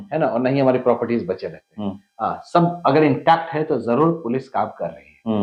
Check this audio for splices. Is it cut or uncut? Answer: uncut